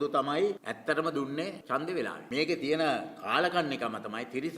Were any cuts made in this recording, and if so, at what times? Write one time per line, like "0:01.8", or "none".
0:02.2